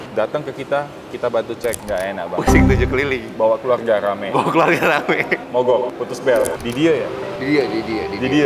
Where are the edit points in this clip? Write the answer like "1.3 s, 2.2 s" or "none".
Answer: 1.8 s, 6.5 s